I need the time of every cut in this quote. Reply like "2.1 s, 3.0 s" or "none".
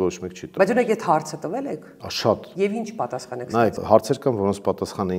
3.8 s